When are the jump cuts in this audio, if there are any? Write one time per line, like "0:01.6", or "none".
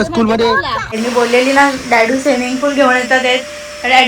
0:01.0